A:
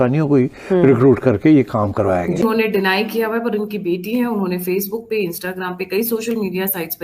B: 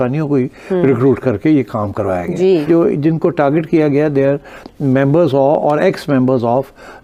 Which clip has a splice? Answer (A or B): A